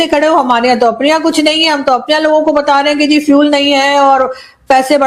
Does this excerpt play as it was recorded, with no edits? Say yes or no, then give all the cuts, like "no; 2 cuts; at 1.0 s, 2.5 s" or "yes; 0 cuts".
yes; 0 cuts